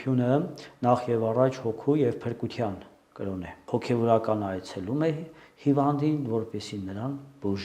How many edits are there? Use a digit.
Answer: 1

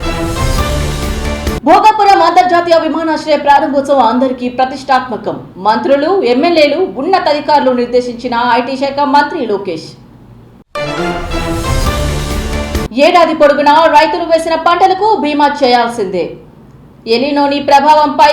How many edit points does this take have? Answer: 1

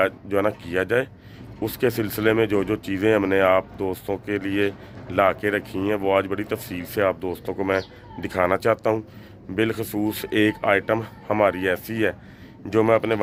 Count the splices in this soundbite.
0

